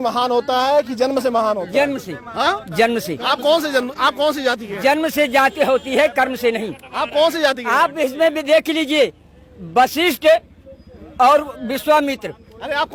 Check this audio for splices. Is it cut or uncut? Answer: uncut